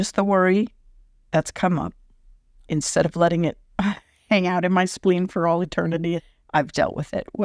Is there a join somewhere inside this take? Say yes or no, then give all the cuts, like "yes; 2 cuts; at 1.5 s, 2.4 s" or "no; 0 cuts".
yes; 2 cuts; at 2.6 s, 6.2 s